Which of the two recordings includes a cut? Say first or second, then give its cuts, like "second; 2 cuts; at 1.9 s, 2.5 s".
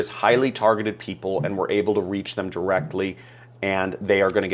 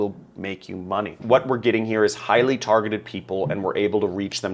second; 1 cut; at 1.1 s